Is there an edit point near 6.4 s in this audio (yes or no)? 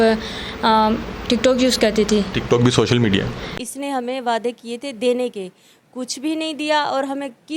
no